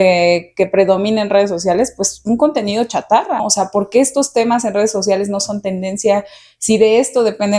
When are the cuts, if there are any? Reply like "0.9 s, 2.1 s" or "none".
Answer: 3.4 s